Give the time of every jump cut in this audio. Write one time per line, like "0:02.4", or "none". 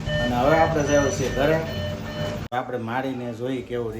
0:02.4